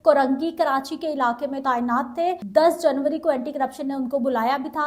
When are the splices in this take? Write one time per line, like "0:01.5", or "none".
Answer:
0:02.4